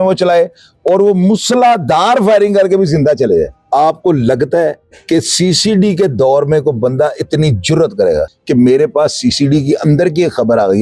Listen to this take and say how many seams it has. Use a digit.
2